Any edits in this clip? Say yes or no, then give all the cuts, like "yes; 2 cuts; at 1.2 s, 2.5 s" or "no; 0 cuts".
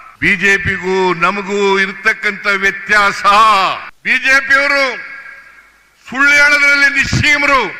no; 0 cuts